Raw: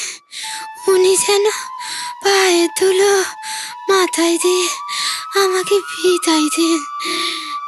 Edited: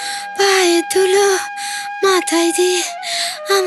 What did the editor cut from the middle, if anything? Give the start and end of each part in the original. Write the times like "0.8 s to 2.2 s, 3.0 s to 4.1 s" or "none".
none